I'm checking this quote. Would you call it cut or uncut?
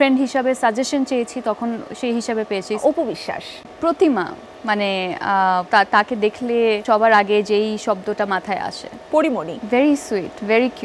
cut